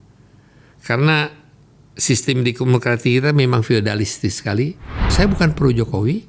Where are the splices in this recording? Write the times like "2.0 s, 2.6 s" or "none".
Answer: 5.1 s